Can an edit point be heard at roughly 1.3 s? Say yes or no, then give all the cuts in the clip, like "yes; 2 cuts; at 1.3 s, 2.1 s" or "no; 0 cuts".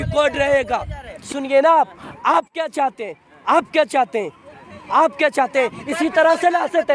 yes; 1 cut; at 1.3 s